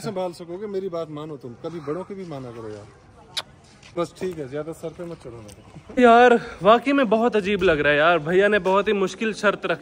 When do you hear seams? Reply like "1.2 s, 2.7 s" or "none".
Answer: 4.0 s, 6.0 s